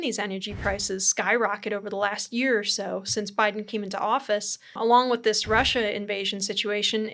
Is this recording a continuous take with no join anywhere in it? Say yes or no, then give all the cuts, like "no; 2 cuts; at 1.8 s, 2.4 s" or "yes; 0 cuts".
no; 1 cut; at 4.7 s